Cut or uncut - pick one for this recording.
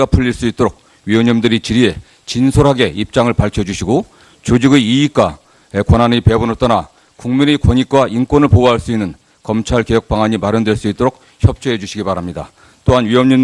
uncut